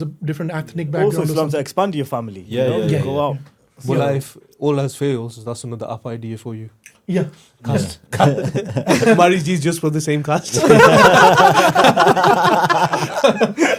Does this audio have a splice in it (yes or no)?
no